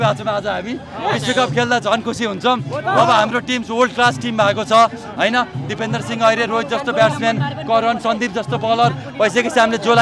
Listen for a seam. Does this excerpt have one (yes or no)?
no